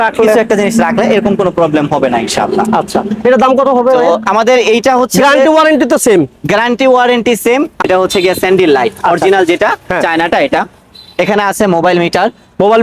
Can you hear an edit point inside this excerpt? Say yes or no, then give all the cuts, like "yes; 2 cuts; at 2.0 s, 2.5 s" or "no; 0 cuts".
yes; 1 cut; at 7.8 s